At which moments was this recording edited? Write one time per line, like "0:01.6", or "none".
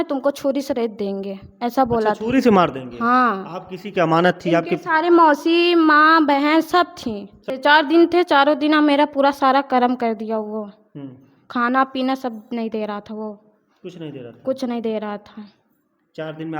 0:07.5